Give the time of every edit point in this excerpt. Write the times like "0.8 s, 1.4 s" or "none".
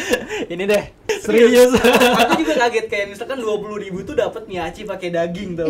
1.2 s